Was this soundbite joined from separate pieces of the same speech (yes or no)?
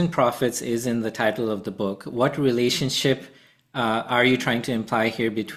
no